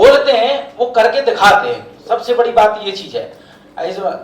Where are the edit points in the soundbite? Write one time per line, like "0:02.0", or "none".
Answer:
none